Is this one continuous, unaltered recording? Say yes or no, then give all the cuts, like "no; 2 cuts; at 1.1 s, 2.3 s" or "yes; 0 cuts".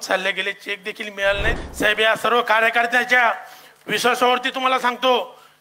no; 1 cut; at 1.6 s